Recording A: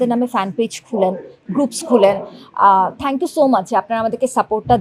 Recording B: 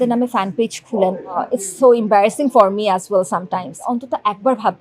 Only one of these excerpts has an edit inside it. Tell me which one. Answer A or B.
B